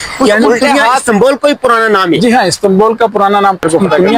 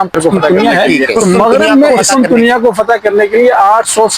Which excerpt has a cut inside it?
second; 1 cut; at 1.9 s

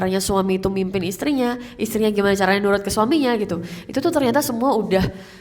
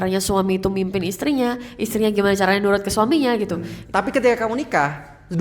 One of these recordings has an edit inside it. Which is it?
second; 1 cut; at 3.7 s

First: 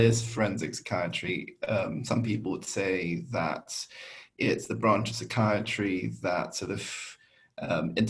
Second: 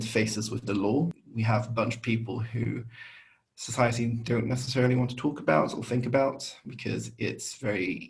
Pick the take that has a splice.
second; 1 cut; at 1.2 s

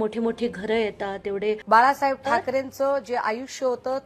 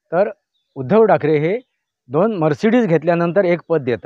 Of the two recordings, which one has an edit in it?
first; 1 cut; at 1.6 s

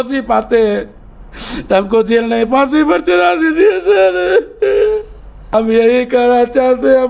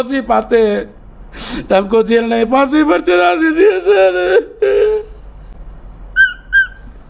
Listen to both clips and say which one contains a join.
first; 1 cut; at 5.5 s

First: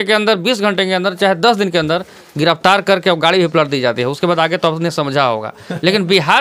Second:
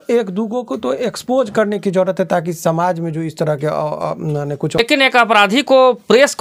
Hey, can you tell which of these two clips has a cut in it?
second; 1 cut; at 4.8 s

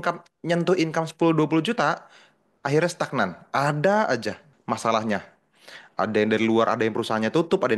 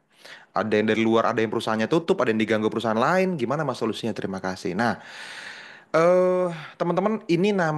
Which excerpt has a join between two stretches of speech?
first; 1 cut; at 4.5 s

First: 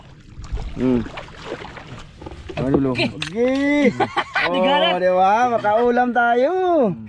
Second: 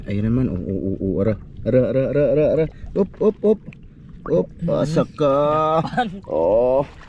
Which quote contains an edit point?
first; 1 cut; at 2.0 s

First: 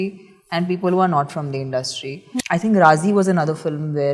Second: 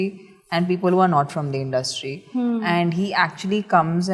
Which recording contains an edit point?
first; 1 cut; at 2.3 s

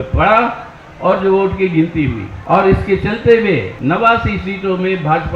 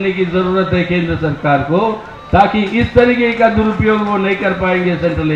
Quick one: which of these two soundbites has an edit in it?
first; 2 cuts; at 2.3 s, 3.7 s

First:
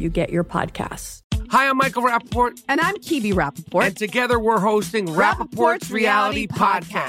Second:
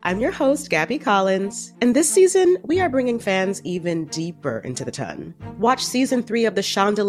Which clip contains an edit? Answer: first; 1 cut; at 1.1 s

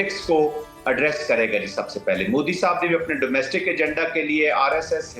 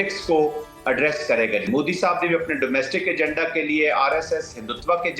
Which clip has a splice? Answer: second; 1 cut; at 1.7 s

